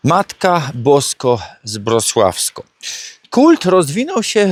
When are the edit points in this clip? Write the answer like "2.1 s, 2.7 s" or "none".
none